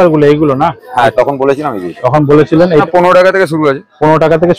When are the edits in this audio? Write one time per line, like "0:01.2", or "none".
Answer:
0:02.8